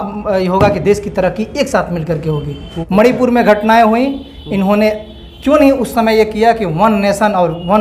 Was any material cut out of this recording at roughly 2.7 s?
yes; 1 cut; at 2.7 s

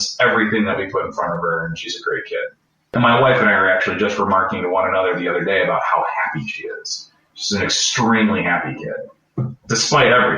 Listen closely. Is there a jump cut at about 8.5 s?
no; 1 cut; at 2.9 s

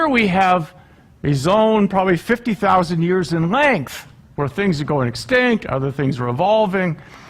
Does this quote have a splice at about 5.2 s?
yes; 1 cut; at 5.2 s

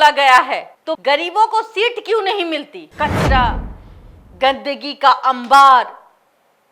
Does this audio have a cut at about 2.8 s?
yes; 1 cut; at 2.8 s

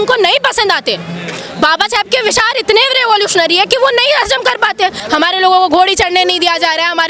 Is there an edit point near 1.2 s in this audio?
no; 1 cut; at 5.0 s

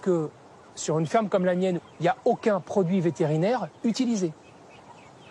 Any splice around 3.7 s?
no; 1 cut; at 1.8 s

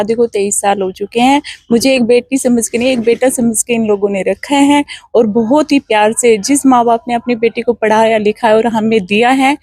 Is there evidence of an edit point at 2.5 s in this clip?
no; 0 cuts

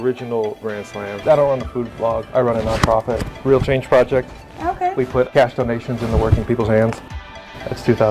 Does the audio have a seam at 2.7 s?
no; 1 cut; at 1.2 s

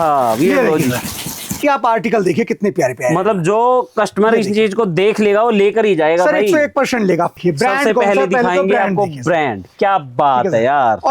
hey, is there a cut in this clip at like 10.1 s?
no; 2 cuts; at 1.6 s, 7.3 s

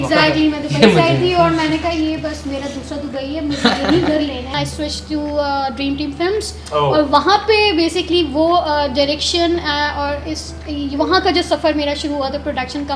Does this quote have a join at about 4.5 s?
yes; 1 cut; at 4.5 s

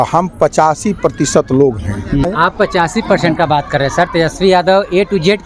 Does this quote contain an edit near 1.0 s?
no; 1 cut; at 2.2 s

